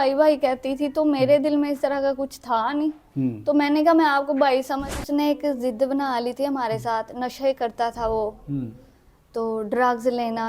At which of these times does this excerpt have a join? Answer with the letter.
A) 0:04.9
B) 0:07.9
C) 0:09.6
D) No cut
A